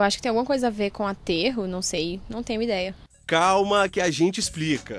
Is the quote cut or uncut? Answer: uncut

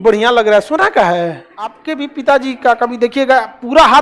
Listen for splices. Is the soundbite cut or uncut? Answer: cut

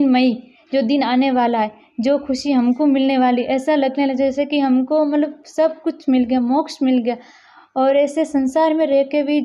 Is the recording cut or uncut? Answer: uncut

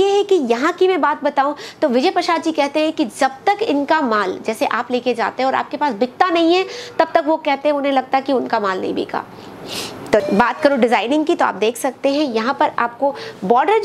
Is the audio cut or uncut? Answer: cut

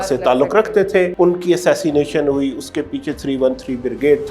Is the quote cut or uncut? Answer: cut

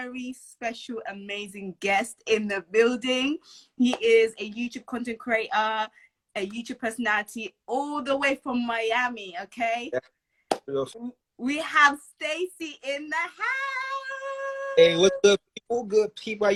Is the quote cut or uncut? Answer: uncut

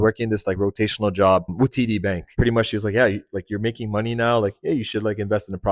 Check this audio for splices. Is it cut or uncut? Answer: uncut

